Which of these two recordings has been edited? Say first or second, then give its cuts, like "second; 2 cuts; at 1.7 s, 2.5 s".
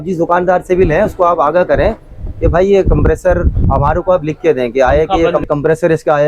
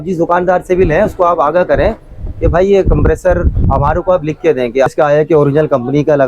second; 1 cut; at 4.9 s